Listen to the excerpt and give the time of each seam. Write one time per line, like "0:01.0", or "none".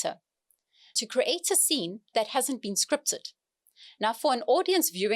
0:00.9